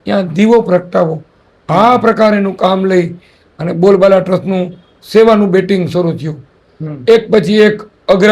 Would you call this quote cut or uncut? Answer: uncut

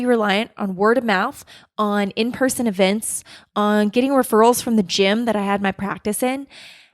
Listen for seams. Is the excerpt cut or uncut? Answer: uncut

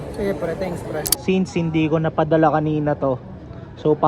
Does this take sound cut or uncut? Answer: cut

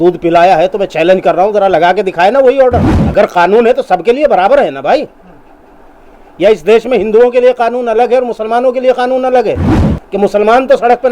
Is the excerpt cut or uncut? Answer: cut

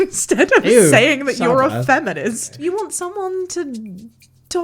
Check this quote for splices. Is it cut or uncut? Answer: cut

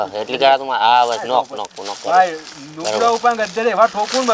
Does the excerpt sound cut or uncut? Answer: uncut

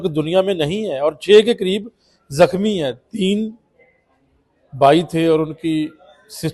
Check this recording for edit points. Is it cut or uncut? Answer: uncut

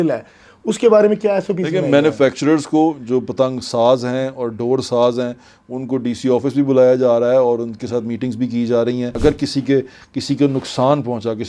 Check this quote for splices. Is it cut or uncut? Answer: cut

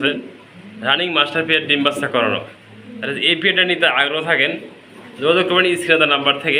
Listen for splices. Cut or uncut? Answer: uncut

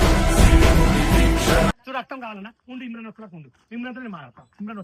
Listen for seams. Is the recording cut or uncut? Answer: cut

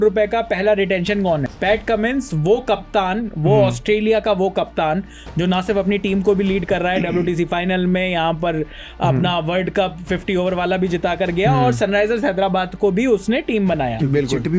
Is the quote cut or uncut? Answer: cut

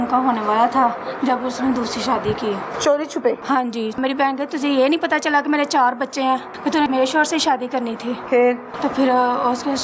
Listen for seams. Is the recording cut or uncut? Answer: cut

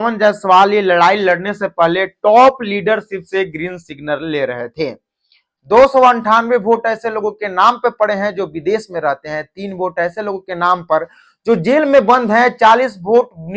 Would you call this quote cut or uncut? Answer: cut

